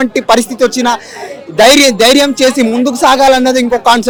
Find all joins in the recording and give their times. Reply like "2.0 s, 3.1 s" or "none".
none